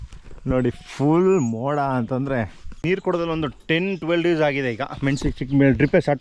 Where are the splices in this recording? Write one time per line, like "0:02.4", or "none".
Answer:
0:02.8